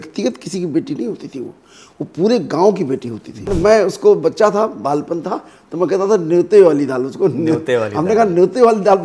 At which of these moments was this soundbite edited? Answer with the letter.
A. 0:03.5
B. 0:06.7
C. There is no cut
A